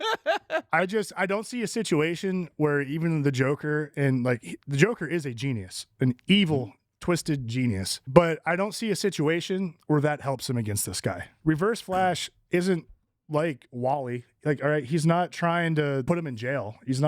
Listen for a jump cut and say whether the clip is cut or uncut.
cut